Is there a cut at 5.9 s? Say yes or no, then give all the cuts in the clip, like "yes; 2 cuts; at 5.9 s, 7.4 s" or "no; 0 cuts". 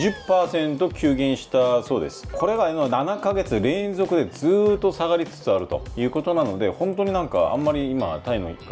no; 0 cuts